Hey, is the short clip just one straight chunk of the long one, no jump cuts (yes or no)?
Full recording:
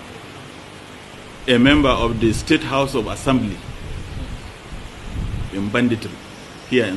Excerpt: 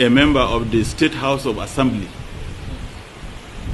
yes